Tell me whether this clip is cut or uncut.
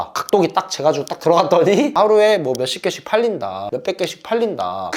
cut